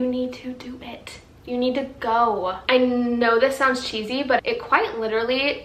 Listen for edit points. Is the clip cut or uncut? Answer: uncut